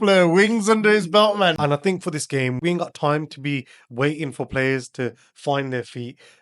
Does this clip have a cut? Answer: yes; 1 cut; at 1.6 s

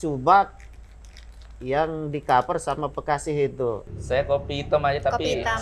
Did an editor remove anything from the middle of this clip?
yes; 1 cut; at 3.9 s

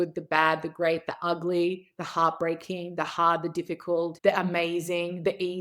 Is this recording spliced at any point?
yes; 1 cut; at 4.2 s

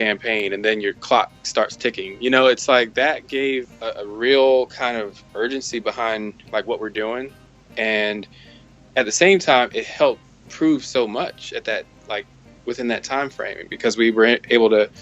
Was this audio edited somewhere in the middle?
yes; 1 cut; at 3.8 s

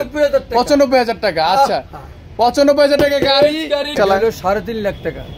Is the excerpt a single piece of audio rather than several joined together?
no; 1 cut; at 3.9 s

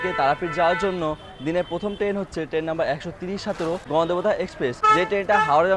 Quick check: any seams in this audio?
yes; 2 cuts; at 3.8 s, 4.8 s

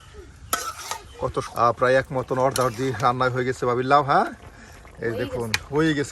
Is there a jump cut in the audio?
yes; 1 cut; at 1.4 s

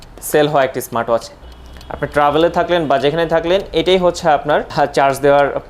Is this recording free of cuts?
no; 2 cuts; at 1.5 s, 4.7 s

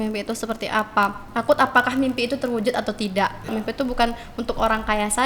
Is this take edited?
yes; 1 cut; at 3.5 s

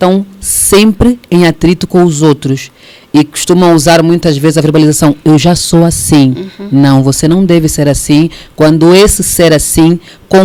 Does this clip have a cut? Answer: no; 0 cuts

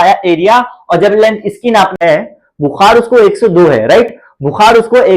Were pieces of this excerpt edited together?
yes; 1 cut; at 1.9 s

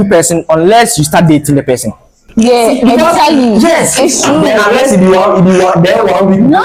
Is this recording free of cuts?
yes; 0 cuts

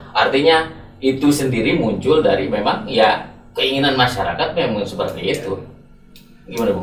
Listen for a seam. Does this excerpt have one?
no; 0 cuts

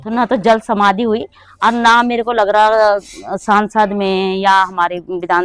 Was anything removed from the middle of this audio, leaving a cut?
no; 0 cuts

